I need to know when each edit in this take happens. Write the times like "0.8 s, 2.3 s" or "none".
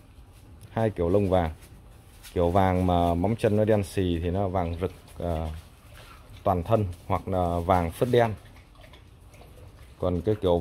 none